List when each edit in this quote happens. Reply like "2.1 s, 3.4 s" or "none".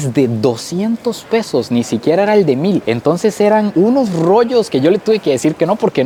none